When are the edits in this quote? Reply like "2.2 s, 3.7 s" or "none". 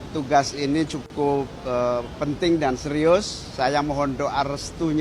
none

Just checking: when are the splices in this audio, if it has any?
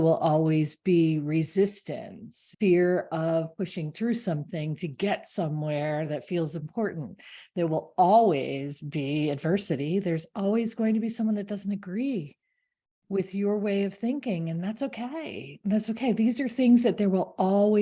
2.4 s

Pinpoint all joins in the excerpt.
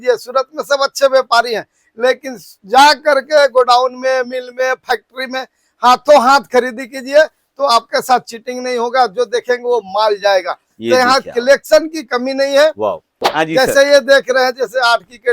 13.1 s

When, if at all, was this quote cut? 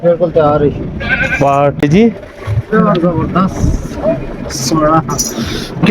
1.8 s

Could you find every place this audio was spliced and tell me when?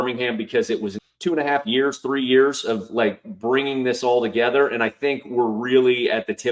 1.0 s

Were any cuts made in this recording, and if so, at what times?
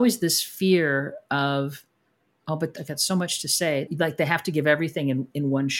2.7 s, 3.9 s

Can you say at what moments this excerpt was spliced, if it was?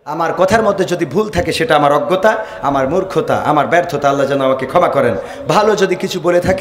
none

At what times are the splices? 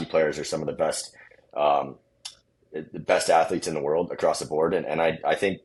none

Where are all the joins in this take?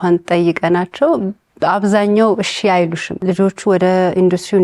3.1 s

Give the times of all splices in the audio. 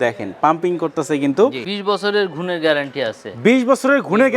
1.6 s

